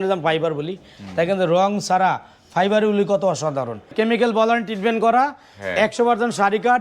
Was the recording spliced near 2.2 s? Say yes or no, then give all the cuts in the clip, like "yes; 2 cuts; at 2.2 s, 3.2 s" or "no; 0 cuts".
no; 1 cut; at 3.9 s